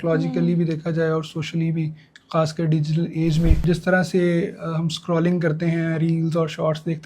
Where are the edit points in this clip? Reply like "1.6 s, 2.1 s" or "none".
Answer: 3.6 s